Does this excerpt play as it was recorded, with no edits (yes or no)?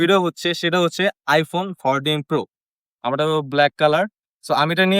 no